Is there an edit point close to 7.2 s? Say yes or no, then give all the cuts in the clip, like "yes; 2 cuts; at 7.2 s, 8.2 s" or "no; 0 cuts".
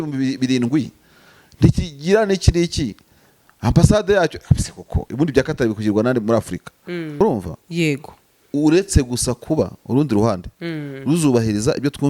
yes; 1 cut; at 7.2 s